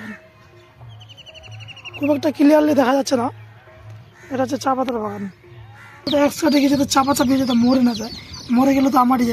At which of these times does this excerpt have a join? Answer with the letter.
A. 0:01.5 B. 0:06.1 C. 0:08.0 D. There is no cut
B